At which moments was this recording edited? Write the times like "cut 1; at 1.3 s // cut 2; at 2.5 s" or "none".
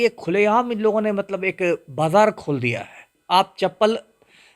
cut 1; at 3.1 s